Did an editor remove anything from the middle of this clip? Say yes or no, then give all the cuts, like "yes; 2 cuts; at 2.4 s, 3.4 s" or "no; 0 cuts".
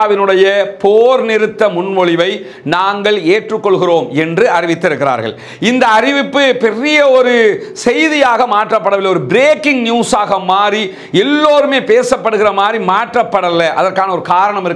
no; 0 cuts